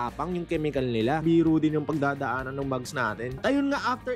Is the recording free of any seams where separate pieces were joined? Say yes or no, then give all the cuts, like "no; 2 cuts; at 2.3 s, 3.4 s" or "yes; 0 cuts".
no; 1 cut; at 1.2 s